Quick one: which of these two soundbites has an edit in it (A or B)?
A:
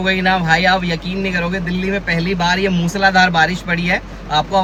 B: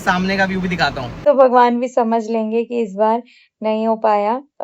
B